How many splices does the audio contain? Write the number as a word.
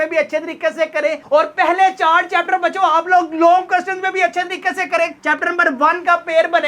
one